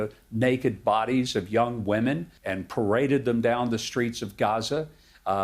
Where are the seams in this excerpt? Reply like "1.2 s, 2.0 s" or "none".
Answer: 2.3 s